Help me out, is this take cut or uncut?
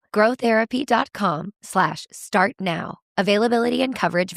uncut